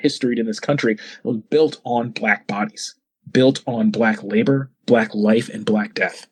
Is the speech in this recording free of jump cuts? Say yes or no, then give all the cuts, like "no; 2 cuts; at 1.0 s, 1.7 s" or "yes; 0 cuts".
yes; 0 cuts